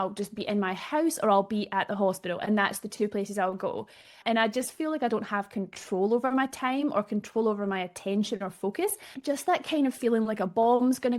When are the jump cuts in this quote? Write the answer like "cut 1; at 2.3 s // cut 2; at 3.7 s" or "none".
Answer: cut 1; at 4.2 s // cut 2; at 9.1 s